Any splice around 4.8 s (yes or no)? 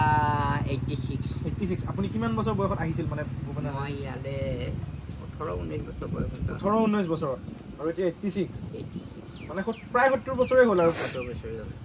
no